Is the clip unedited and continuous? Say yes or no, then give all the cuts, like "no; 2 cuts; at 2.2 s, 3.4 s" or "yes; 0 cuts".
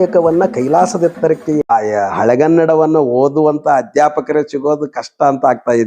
no; 1 cut; at 1.6 s